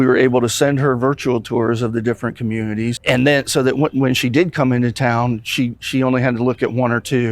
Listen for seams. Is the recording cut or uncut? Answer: cut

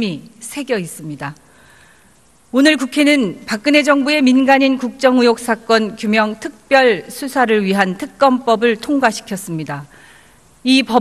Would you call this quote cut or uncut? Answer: cut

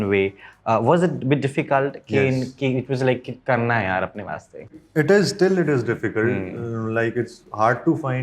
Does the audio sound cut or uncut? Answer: cut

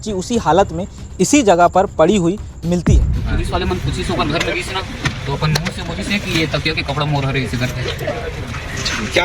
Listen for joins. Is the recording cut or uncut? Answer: cut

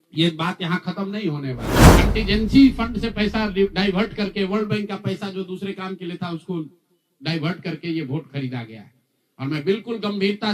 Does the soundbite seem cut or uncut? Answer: cut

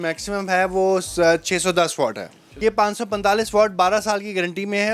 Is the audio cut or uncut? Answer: cut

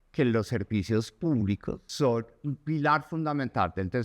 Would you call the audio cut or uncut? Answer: cut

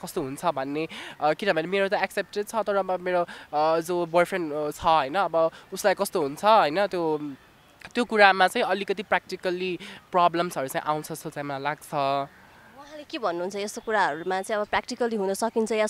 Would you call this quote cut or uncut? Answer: uncut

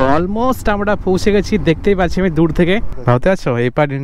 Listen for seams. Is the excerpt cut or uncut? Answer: cut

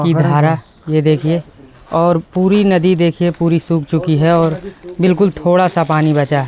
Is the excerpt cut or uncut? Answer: uncut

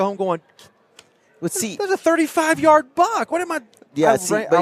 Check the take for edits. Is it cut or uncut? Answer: uncut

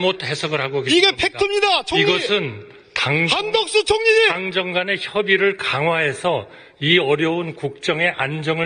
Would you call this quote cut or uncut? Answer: uncut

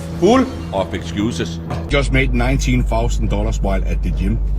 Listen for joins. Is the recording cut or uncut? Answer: cut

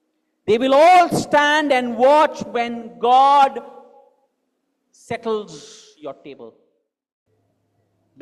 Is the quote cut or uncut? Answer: cut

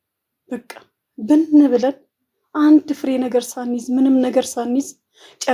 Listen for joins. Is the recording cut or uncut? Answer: uncut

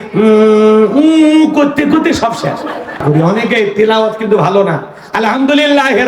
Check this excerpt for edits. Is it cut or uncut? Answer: cut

